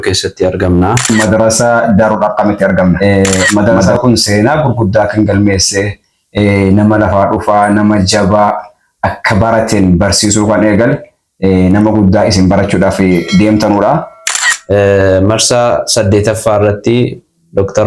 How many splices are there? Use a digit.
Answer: 3